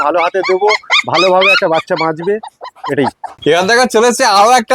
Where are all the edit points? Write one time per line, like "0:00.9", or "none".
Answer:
none

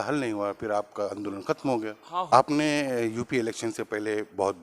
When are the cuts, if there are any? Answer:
0:02.3

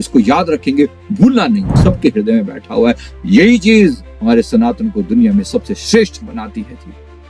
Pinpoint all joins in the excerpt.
0:01.8

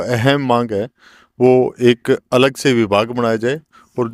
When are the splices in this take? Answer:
none

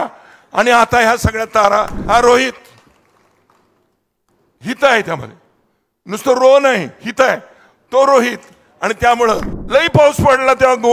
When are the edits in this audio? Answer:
0:02.0
0:09.5

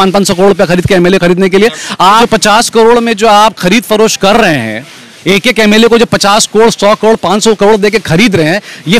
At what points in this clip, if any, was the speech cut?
0:02.2

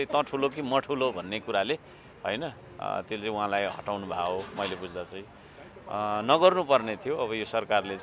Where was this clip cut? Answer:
none

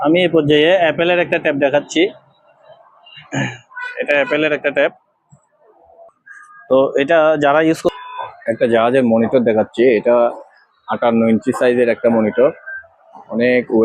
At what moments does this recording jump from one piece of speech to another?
0:06.2
0:07.9

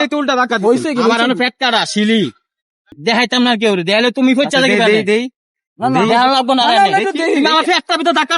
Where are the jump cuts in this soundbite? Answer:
0:02.9

